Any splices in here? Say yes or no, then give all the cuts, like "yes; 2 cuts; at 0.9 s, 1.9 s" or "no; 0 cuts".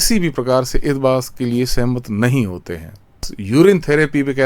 yes; 1 cut; at 3.3 s